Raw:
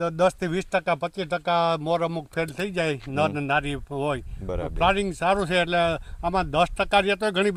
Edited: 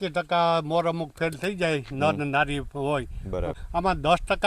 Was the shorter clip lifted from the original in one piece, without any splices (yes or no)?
no